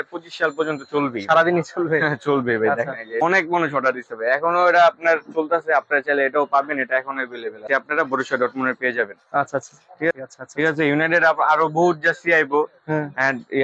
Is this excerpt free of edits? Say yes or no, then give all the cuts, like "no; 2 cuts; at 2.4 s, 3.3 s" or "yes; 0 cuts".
no; 3 cuts; at 3.2 s, 7.6 s, 10.1 s